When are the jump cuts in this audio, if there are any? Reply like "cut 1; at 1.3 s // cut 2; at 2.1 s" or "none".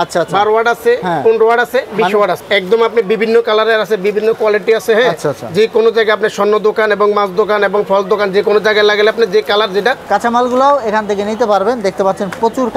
cut 1; at 2.4 s // cut 2; at 10.0 s